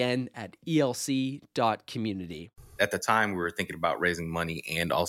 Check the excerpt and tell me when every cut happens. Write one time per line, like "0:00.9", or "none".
0:02.7